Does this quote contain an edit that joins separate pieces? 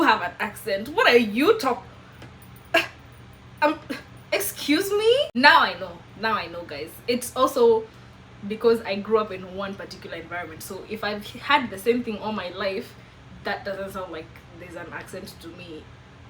no; 0 cuts

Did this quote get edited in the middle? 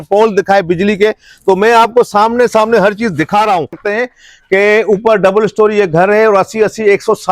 yes; 1 cut; at 3.8 s

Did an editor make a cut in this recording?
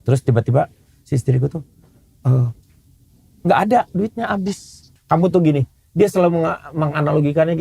yes; 1 cut; at 4.9 s

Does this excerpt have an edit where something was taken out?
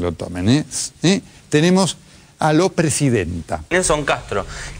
yes; 1 cut; at 3.7 s

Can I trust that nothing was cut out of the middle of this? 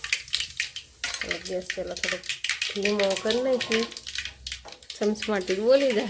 yes; 0 cuts

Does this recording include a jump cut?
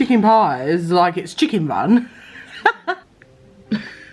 yes; 1 cut; at 3.0 s

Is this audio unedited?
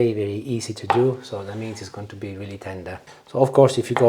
no; 1 cut; at 3.1 s

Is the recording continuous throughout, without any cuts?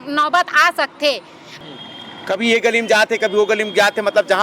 no; 1 cut; at 1.5 s

